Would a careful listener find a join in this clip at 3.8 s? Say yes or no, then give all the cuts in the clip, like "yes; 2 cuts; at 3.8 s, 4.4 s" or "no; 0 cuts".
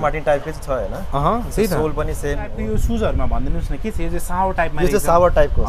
no; 1 cut; at 2.6 s